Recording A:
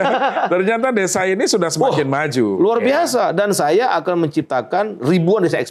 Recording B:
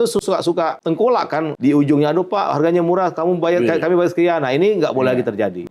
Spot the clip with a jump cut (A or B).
B